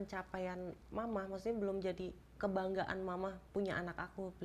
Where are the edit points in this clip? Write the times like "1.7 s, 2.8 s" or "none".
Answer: 3.4 s